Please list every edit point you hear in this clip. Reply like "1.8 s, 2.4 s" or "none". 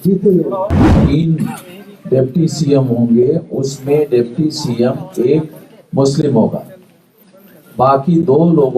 0.9 s